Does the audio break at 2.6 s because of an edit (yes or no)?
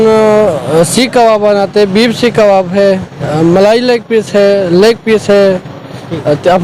no